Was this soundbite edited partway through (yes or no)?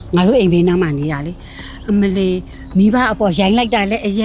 no